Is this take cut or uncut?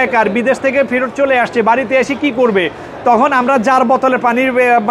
uncut